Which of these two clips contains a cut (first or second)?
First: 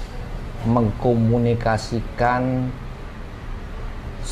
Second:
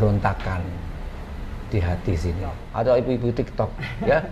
second